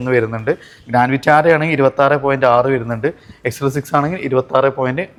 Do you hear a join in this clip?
no; 0 cuts

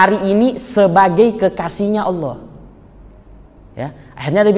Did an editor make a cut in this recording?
no; 0 cuts

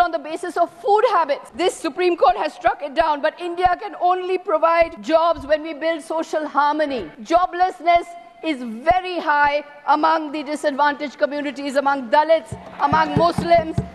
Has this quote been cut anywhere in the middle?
yes; 3 cuts; at 1.5 s, 5.0 s, 7.1 s

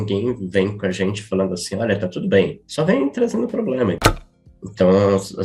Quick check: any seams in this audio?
yes; 2 cuts; at 2.6 s, 4.0 s

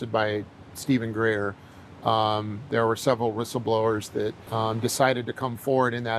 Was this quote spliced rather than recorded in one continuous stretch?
yes; 1 cut; at 4.4 s

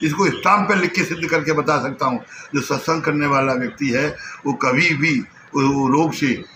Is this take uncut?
yes; 0 cuts

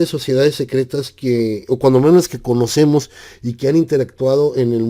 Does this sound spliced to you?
yes; 1 cut; at 2.4 s

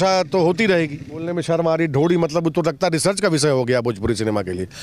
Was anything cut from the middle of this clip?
yes; 1 cut; at 1.3 s

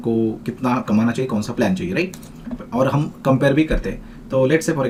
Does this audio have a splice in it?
no; 0 cuts

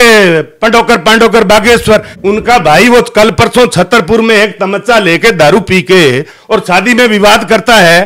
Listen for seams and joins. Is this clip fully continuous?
no; 1 cut; at 2.1 s

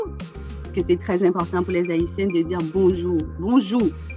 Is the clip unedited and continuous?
yes; 0 cuts

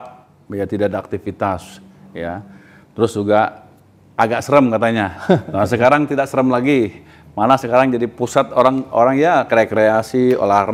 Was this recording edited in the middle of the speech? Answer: no; 0 cuts

